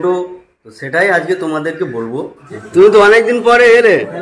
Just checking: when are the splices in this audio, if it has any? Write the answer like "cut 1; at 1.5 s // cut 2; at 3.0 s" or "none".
cut 1; at 2.5 s